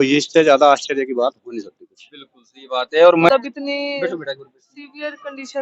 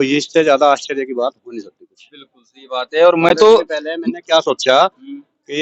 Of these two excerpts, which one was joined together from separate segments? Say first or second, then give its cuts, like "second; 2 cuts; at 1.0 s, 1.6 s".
first; 1 cut; at 3.3 s